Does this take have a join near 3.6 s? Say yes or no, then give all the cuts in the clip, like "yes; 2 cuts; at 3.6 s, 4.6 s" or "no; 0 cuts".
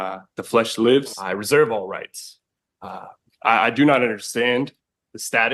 no; 1 cut; at 1.3 s